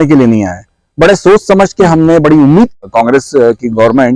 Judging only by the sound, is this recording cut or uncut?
cut